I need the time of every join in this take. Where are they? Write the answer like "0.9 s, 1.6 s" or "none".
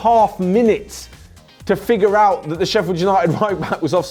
none